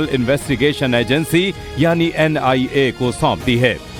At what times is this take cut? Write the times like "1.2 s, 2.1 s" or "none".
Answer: none